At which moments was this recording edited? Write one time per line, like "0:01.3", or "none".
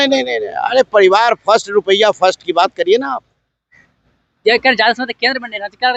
none